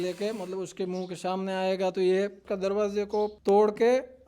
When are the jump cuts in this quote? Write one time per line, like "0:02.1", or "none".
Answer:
0:02.4
0:03.4